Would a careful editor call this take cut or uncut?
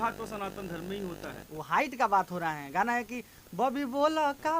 cut